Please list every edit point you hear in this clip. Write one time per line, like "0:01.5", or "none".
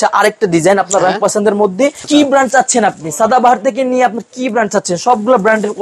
0:02.0